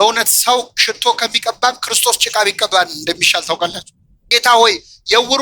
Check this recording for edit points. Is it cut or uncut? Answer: cut